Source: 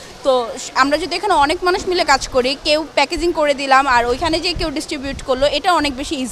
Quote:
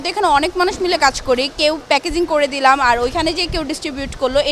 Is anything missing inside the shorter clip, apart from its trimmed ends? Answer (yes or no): no